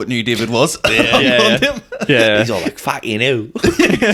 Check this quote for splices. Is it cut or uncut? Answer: uncut